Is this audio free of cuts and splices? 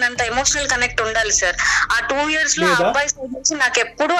yes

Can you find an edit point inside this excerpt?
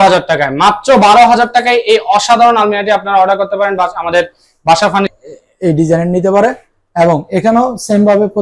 yes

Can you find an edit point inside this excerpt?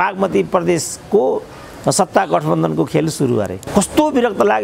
yes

